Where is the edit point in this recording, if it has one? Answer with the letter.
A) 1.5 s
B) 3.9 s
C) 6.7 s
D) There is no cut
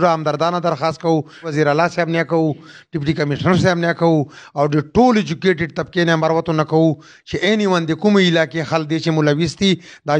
A